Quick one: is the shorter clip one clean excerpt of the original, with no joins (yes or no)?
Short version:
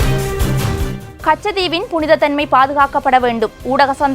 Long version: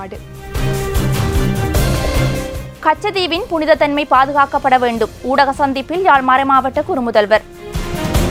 no